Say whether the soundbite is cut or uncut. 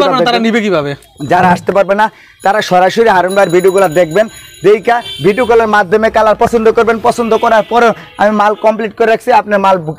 uncut